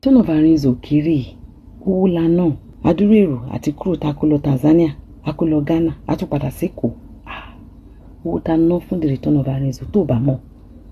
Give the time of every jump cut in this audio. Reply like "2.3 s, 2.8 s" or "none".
2.7 s